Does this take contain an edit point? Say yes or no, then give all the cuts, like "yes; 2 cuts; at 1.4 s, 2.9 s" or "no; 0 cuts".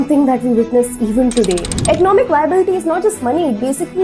yes; 1 cut; at 1.7 s